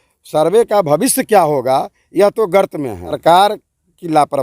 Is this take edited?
yes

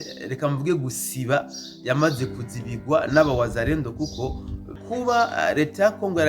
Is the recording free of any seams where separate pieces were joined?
no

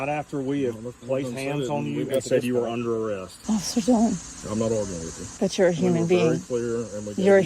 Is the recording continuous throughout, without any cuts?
no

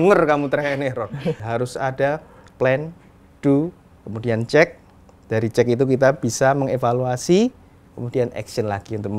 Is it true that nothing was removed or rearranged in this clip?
no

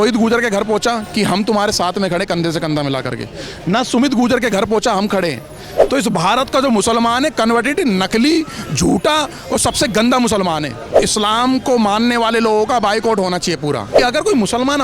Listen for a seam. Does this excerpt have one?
yes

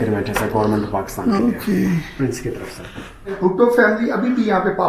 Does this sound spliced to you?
yes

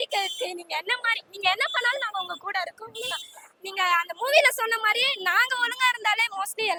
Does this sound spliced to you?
no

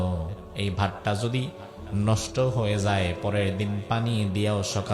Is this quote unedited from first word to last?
yes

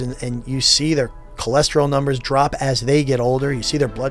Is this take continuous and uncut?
yes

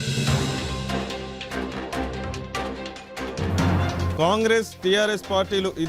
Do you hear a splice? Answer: no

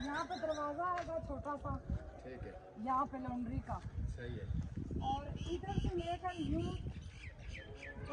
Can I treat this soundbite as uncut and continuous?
yes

